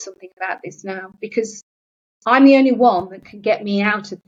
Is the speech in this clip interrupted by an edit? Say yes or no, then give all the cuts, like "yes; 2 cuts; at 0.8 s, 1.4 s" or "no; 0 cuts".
no; 0 cuts